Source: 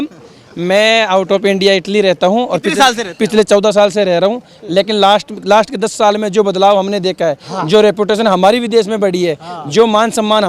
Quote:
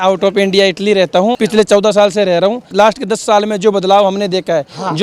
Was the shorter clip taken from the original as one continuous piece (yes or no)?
no